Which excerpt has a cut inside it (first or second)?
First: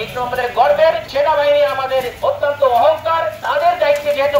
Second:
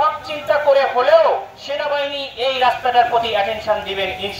first